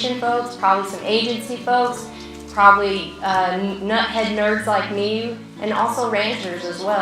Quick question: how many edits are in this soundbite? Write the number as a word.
one